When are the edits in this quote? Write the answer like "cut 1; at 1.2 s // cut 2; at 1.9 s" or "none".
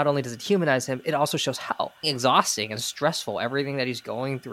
cut 1; at 2.0 s